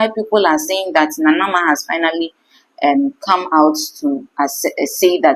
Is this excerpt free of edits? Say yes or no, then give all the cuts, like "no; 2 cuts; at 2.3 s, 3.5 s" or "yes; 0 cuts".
yes; 0 cuts